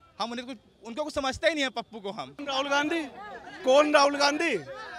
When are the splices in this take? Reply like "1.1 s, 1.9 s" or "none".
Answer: 2.4 s